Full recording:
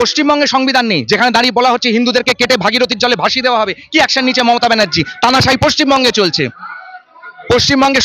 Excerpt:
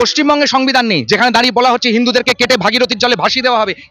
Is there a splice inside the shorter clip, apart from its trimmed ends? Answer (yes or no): no